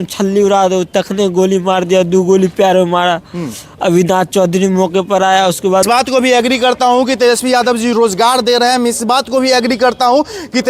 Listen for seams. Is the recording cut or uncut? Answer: cut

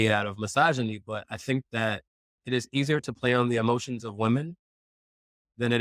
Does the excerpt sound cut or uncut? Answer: uncut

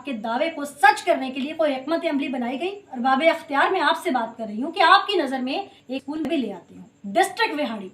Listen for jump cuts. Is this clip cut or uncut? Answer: cut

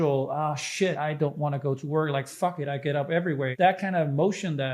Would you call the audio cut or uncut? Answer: cut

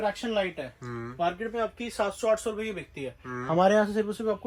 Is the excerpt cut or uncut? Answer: uncut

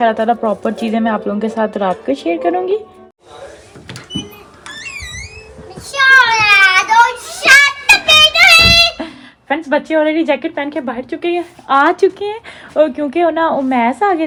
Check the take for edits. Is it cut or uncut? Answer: uncut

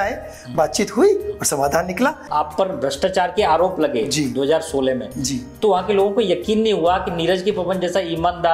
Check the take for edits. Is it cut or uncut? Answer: cut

